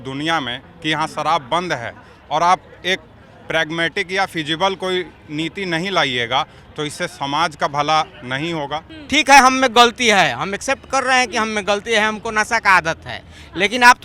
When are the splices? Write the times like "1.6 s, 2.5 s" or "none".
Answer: 8.9 s

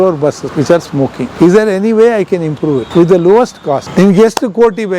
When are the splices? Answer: 0.8 s, 2.9 s, 3.9 s

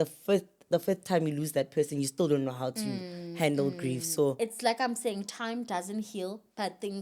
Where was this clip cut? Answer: 4.4 s

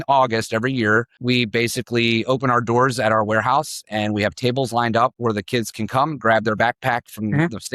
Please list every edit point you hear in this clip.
1.1 s

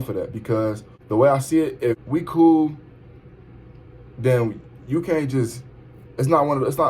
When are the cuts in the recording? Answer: 0.9 s, 2.0 s

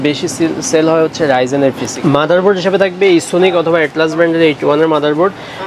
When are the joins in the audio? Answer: 1.9 s

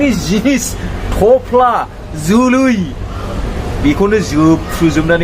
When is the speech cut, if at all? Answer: none

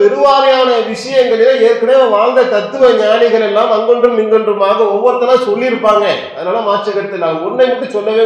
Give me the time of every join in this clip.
none

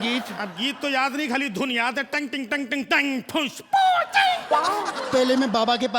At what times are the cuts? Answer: 5.0 s

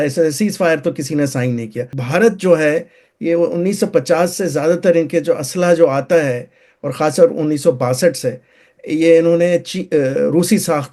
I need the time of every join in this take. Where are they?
1.9 s

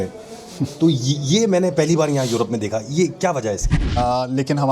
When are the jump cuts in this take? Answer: 3.8 s

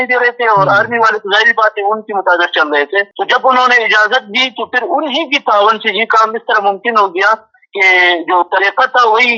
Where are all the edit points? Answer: 3.1 s

